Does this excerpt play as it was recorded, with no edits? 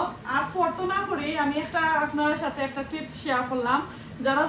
yes; 0 cuts

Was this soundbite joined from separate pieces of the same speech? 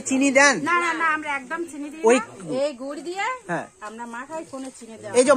yes; 1 cut; at 2.5 s

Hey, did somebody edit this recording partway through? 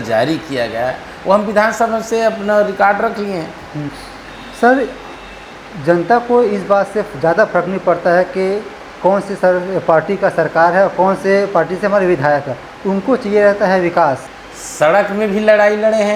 yes; 2 cuts; at 3.9 s, 14.3 s

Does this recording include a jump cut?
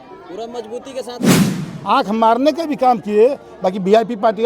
yes; 1 cut; at 1.5 s

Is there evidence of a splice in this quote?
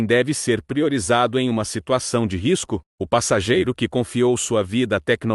no; 0 cuts

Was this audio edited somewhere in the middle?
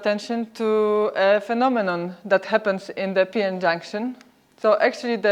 no; 0 cuts

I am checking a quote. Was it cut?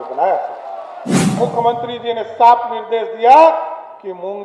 yes; 1 cut; at 1.4 s

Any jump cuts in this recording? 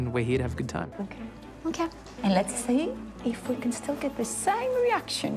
yes; 1 cut; at 1.0 s

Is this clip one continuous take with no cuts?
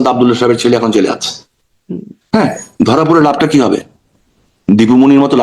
yes; 0 cuts

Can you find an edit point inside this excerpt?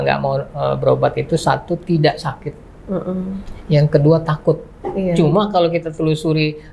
no; 0 cuts

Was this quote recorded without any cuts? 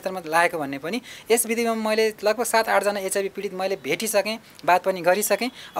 yes; 0 cuts

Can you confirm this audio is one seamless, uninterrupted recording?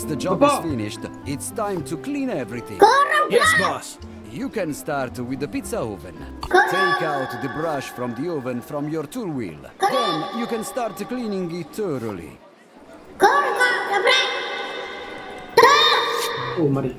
yes; 0 cuts

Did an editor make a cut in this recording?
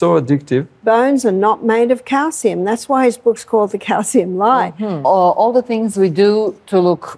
yes; 2 cuts; at 0.8 s, 4.9 s

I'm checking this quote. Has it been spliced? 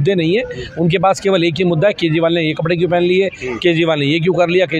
no; 0 cuts

